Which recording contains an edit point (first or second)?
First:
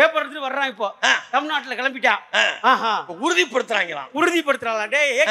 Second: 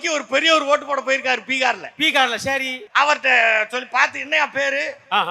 second